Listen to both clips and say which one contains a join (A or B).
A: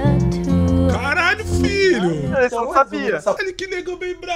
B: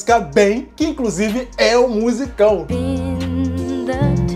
A